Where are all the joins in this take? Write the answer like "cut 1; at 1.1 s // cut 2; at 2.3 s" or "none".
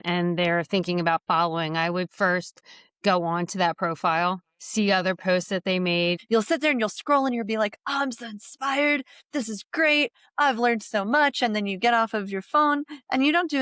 cut 1; at 6.2 s